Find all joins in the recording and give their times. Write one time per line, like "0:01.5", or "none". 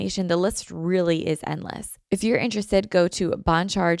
0:01.9